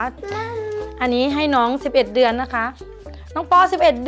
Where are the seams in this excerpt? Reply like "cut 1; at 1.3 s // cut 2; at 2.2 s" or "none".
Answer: none